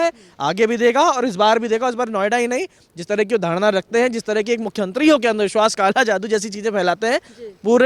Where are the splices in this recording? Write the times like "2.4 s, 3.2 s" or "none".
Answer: none